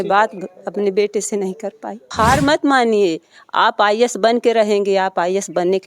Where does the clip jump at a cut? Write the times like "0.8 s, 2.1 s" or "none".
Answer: 2.1 s